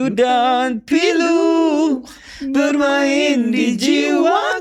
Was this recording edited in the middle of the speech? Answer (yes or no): no